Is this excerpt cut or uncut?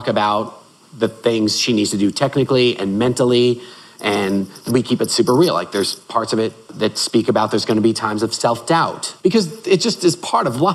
cut